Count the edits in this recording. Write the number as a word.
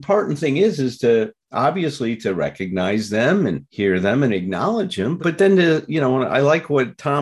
one